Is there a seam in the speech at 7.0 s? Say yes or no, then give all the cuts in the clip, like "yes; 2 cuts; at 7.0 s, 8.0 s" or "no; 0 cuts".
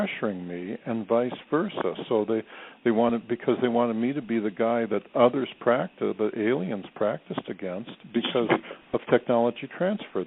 yes; 1 cut; at 7.0 s